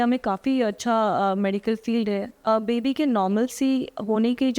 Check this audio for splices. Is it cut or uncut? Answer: cut